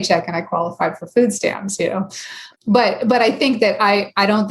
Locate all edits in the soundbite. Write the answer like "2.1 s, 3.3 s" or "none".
2.4 s